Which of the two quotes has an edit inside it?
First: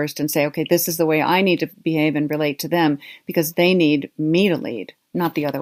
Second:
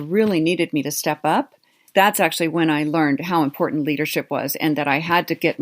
second; 1 cut; at 1.8 s

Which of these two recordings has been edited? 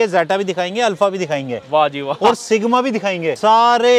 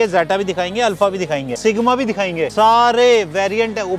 second; 1 cut; at 1.6 s

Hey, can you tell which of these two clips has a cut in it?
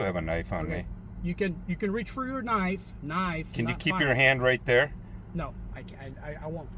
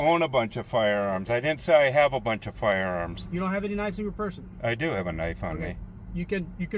second; 1 cut; at 3.2 s

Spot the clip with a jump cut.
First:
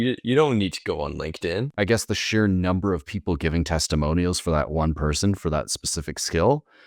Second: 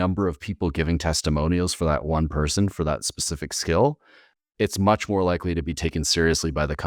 first; 1 cut; at 1.7 s

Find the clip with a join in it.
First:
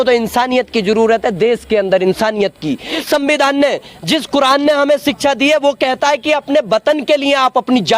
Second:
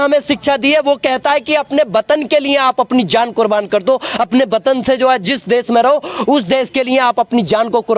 first; 1 cut; at 2.9 s

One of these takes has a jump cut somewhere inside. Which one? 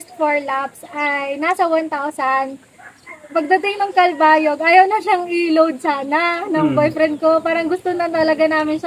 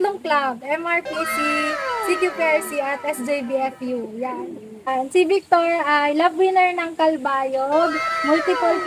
second; 1 cut; at 4.9 s

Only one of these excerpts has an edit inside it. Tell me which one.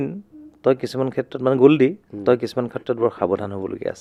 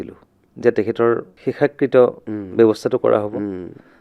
second; 1 cut; at 1.3 s

